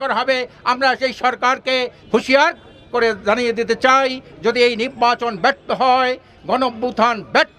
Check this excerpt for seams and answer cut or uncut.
cut